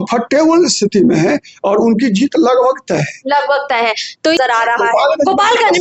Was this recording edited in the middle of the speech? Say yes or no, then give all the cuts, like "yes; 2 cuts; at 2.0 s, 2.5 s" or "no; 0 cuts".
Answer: yes; 1 cut; at 4.4 s